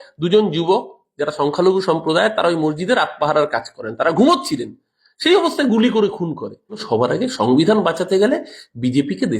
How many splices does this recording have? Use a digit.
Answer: 1